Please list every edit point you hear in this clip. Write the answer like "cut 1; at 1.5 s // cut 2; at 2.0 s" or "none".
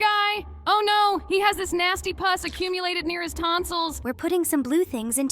cut 1; at 4.0 s